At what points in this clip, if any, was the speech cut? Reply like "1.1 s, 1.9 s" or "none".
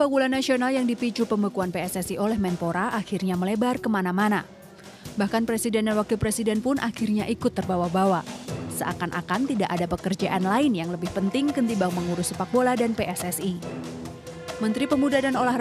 none